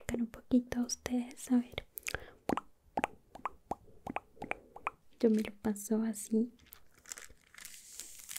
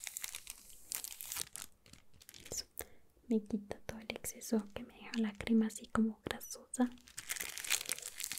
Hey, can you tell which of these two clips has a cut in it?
first; 1 cut; at 5.0 s

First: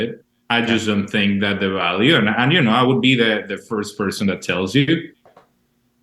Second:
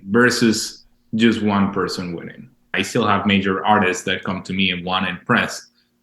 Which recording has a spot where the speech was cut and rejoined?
second; 1 cut; at 2.7 s

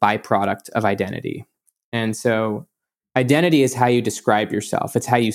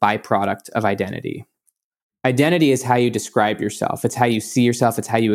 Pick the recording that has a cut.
second; 1 cut; at 1.8 s

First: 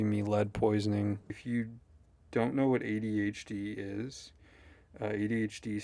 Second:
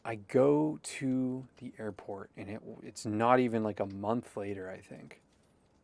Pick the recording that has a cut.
first; 1 cut; at 1.3 s

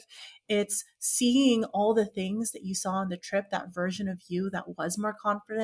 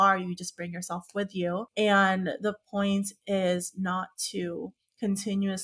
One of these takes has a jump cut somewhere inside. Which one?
second; 1 cut; at 1.7 s

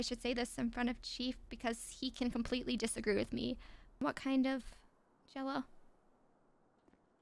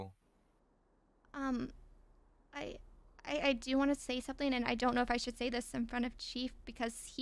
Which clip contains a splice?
first; 1 cut; at 4.0 s

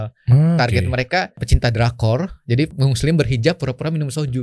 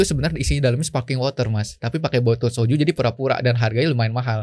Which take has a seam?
first; 2 cuts; at 1.5 s, 2.7 s

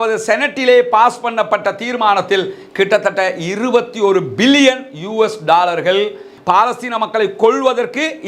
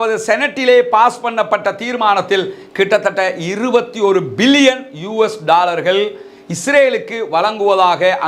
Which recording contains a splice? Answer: first; 1 cut; at 6.3 s

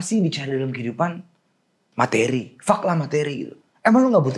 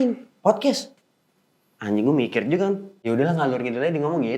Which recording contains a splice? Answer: second; 1 cut; at 2.9 s

